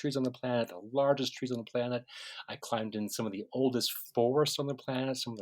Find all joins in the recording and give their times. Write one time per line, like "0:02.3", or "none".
none

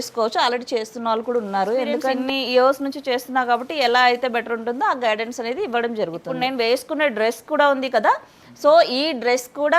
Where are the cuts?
0:02.2
0:06.3

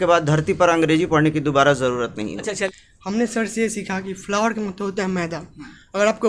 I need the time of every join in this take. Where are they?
0:02.6

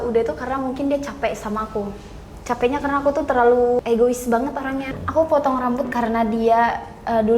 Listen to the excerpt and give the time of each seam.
0:03.8
0:04.9

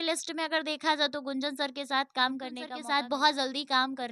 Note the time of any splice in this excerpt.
0:02.7

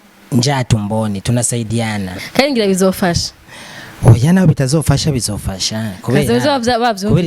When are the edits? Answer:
0:02.1

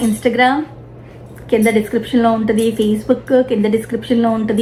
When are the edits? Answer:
none

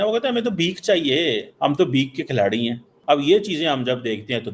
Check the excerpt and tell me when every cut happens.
0:01.5
0:02.9

